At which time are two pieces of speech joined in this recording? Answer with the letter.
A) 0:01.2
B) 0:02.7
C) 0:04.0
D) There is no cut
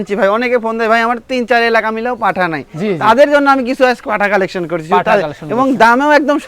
D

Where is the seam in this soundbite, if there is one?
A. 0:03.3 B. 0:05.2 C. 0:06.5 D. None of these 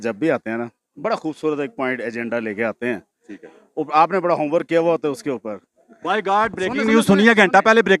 D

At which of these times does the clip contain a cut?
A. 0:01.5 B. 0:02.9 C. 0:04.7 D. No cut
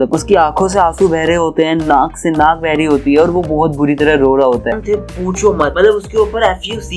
C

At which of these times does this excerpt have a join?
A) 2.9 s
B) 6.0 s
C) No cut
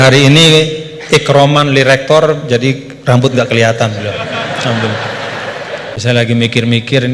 B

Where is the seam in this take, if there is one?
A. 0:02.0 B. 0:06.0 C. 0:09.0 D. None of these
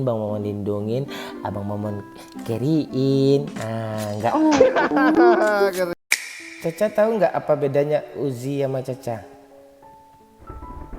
B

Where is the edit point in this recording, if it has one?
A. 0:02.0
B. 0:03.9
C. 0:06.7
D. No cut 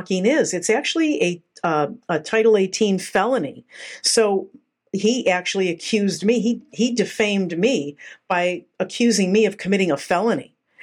D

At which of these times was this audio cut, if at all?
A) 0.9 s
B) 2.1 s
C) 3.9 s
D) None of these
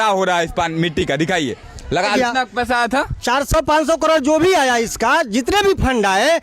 B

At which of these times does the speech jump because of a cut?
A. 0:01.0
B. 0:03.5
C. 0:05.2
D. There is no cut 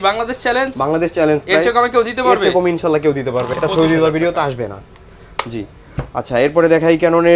B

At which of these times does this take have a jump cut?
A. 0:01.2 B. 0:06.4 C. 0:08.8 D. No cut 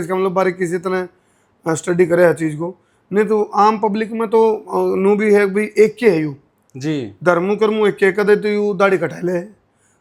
D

